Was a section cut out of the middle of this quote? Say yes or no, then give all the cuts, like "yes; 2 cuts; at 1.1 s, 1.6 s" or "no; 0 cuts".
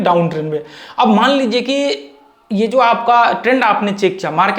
no; 0 cuts